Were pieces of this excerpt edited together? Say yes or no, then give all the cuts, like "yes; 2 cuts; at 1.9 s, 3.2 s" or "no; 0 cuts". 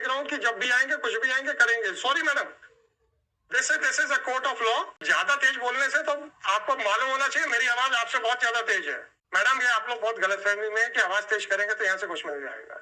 yes; 2 cuts; at 5.0 s, 9.1 s